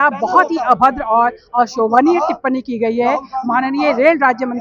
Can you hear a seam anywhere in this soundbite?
no; 0 cuts

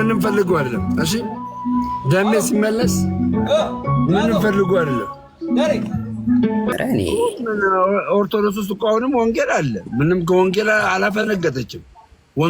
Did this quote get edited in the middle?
yes; 1 cut; at 6.7 s

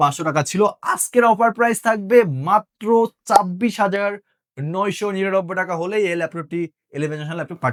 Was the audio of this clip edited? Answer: no; 0 cuts

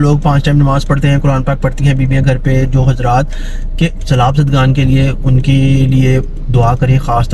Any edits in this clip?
no; 0 cuts

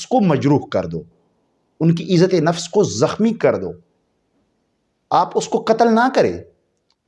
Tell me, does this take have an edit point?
no; 0 cuts

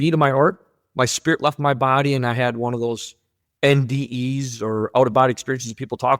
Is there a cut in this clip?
no; 0 cuts

